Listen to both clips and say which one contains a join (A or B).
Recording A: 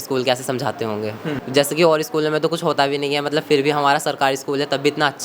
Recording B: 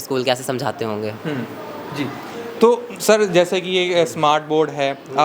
A